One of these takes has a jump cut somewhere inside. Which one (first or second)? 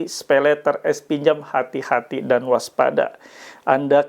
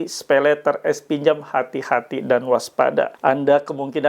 second